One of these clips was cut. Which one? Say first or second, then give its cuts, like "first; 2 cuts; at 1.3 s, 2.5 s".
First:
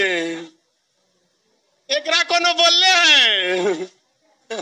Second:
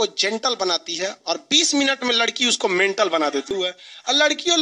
second; 1 cut; at 3.5 s